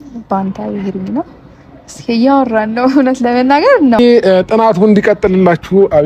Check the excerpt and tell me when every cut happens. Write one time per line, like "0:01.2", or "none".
0:04.0

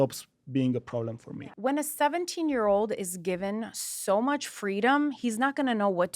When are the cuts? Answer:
0:01.4

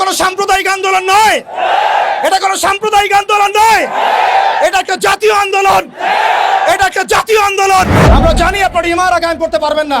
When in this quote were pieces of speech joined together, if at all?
0:07.9

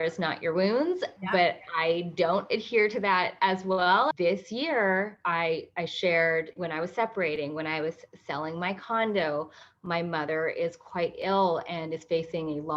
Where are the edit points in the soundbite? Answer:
0:04.2
0:06.6

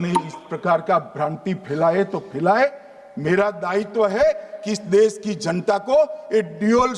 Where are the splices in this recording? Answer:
none

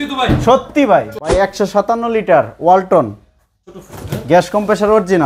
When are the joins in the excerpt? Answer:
0:01.3

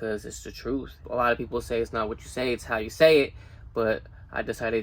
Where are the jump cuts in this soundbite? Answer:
0:01.0

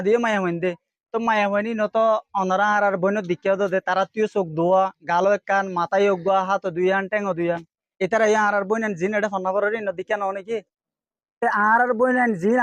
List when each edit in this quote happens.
none

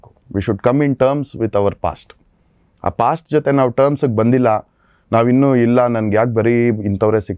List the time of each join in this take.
none

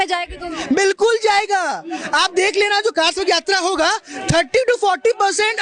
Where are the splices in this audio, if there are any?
none

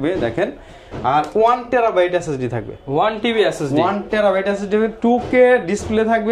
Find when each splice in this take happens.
none

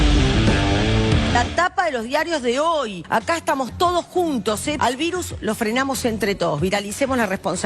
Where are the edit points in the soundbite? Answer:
0:01.4

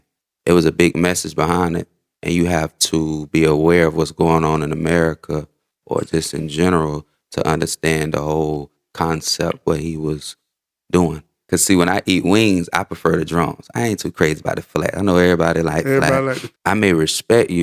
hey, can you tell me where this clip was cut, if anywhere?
0:11.3
0:16.5

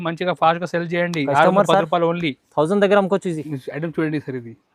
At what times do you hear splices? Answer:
0:03.4

